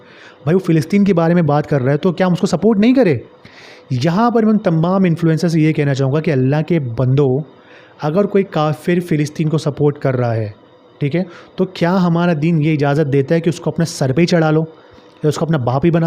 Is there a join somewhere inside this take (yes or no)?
no